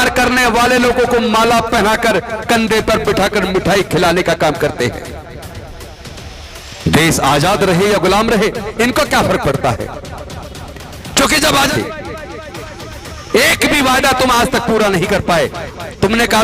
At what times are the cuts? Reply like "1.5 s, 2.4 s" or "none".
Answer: 11.7 s